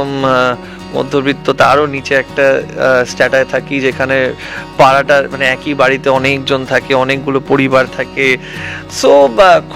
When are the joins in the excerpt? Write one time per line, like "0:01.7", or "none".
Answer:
none

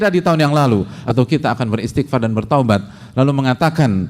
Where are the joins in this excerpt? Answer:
0:00.9

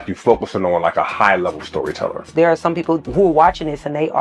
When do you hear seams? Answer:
0:02.3
0:03.1

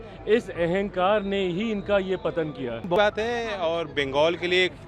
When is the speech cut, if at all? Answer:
0:03.0

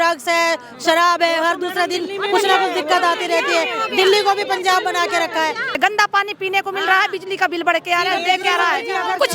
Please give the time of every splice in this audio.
0:05.8

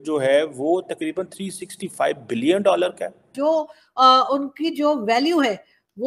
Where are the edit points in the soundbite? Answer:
0:03.3

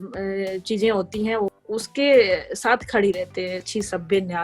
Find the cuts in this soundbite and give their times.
0:01.6
0:03.6

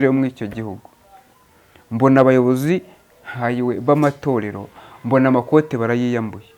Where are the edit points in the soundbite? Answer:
none

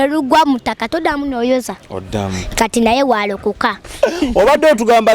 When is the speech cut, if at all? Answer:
0:03.9

